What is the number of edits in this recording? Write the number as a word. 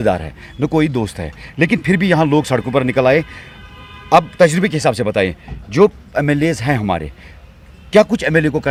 zero